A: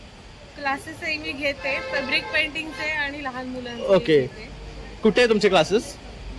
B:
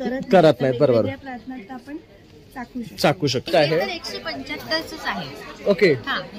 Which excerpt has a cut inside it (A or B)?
B